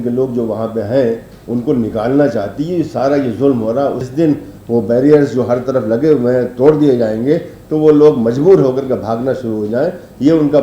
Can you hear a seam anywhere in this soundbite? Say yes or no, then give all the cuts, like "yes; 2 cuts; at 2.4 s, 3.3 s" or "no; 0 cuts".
yes; 1 cut; at 4.0 s